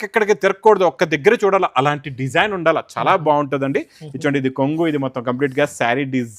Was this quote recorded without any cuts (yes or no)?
yes